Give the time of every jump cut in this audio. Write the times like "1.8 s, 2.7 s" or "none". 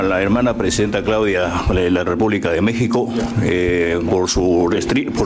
none